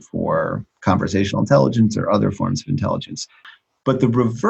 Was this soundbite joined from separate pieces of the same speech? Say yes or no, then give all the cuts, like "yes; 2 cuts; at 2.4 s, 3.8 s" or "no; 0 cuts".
yes; 1 cut; at 3.4 s